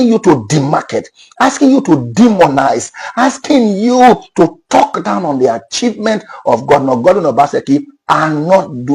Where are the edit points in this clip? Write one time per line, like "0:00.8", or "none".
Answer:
none